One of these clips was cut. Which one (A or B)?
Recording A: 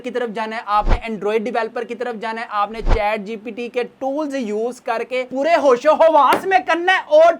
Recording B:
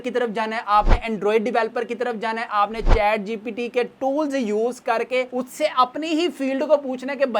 A